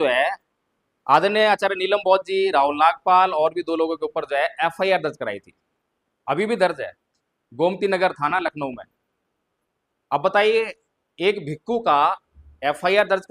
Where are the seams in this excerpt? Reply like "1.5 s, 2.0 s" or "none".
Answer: none